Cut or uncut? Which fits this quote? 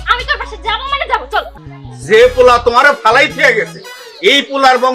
cut